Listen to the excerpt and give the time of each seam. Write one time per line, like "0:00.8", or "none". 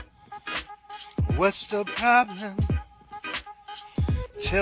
0:01.3